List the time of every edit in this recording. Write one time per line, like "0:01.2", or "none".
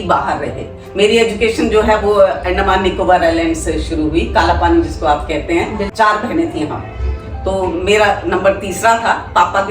0:05.9